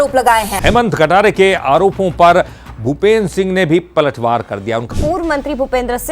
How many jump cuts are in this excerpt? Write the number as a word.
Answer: one